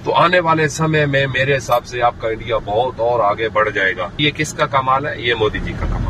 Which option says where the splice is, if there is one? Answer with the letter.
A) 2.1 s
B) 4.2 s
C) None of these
B